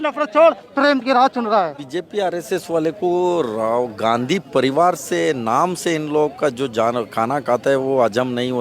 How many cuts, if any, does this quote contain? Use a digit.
1